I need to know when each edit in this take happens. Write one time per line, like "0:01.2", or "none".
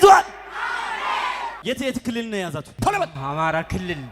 0:01.5
0:02.7